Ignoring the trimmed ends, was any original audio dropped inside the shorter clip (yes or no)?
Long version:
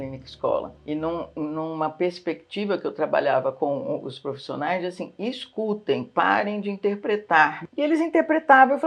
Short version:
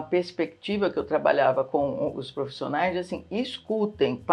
no